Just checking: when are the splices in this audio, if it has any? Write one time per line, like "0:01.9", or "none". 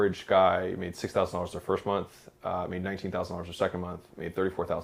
none